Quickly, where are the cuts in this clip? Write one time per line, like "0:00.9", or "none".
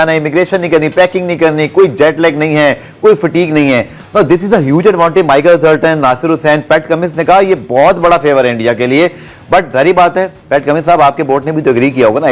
none